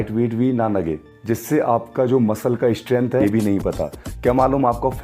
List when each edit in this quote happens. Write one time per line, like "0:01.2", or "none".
0:03.2